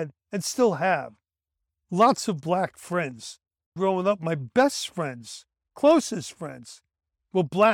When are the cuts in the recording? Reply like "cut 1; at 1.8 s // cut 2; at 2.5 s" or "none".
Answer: cut 1; at 3.7 s